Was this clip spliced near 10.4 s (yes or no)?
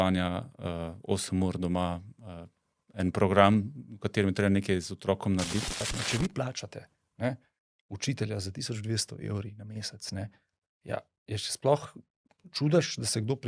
no